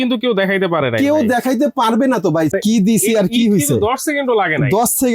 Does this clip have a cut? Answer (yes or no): yes